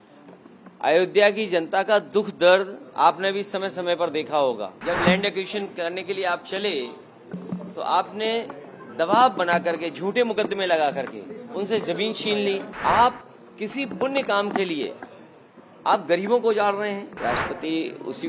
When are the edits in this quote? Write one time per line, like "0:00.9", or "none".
0:04.8
0:12.7
0:17.1